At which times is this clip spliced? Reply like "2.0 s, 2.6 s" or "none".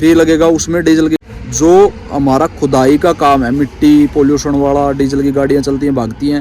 1.2 s